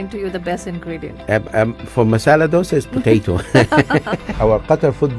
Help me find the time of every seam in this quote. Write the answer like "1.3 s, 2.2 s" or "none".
4.3 s